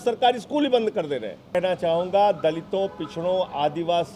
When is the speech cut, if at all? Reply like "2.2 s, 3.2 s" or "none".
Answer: 1.5 s